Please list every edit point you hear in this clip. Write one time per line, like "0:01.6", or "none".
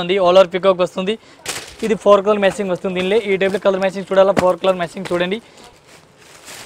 0:01.5
0:05.6